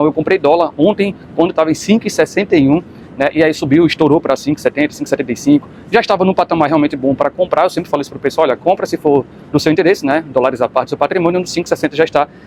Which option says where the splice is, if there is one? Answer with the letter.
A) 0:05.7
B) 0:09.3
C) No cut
C